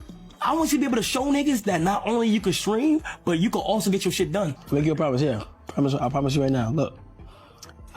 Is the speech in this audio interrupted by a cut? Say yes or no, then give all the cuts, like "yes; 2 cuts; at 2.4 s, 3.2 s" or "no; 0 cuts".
yes; 1 cut; at 4.6 s